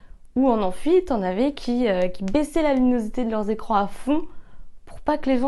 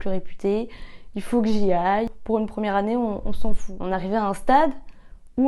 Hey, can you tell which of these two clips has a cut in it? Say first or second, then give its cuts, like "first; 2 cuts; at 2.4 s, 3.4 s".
second; 2 cuts; at 2.1 s, 3.7 s